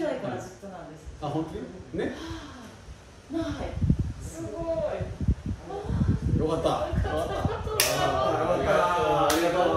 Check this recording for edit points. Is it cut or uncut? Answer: uncut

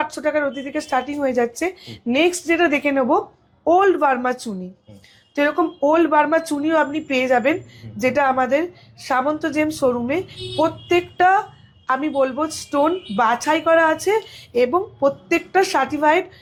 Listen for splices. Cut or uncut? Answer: uncut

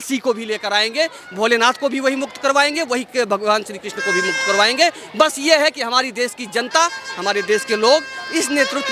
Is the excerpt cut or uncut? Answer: uncut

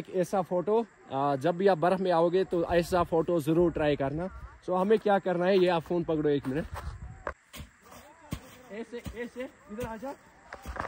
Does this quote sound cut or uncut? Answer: cut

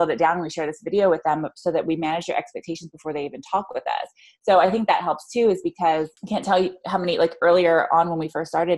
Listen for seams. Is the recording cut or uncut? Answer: cut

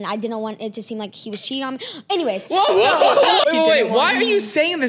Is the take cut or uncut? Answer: cut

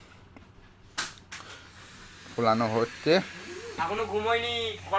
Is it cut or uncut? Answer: cut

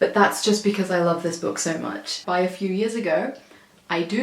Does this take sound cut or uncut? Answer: cut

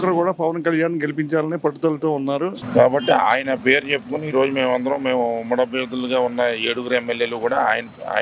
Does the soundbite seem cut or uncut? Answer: cut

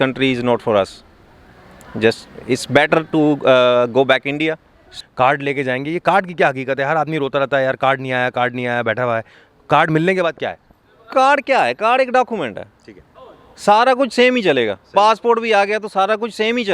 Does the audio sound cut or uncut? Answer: cut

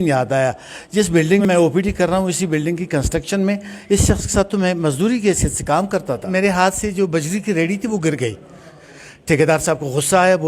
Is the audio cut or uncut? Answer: cut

